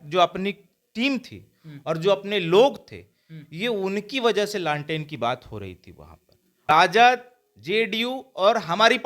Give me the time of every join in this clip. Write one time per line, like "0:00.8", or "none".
0:06.7